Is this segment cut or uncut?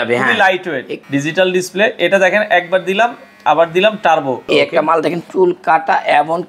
cut